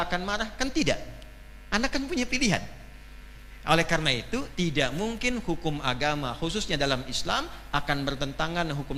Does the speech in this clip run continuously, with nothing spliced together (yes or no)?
yes